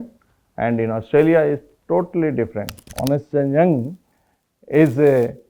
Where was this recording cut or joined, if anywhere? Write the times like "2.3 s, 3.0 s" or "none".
2.8 s